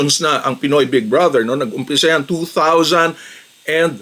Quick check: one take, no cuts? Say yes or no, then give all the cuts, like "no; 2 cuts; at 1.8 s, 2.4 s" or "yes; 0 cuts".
yes; 0 cuts